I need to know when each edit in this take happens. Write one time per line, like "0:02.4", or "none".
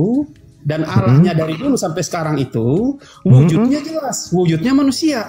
none